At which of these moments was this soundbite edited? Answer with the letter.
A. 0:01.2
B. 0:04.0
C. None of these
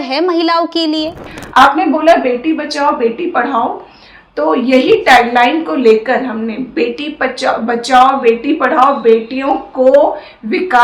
A